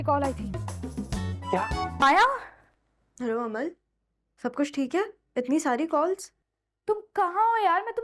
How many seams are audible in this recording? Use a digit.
1